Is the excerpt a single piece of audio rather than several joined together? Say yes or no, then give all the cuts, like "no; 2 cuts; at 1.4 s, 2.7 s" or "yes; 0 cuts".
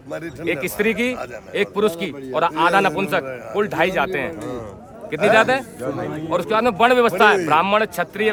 yes; 0 cuts